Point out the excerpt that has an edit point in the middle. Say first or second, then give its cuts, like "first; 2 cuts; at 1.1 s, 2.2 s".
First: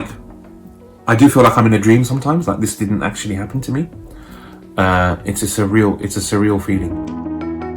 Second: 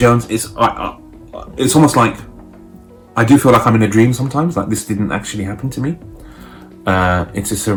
first; 1 cut; at 6.9 s